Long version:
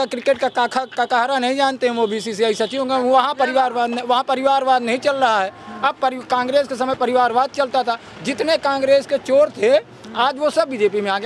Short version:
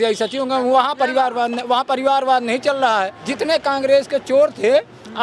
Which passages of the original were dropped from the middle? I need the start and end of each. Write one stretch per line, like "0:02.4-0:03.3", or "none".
0:05.6-0:08.2